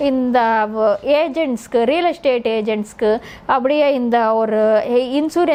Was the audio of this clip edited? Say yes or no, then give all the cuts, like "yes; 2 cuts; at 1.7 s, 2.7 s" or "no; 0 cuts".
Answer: no; 0 cuts